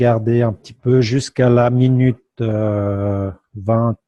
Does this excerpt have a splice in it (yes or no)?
yes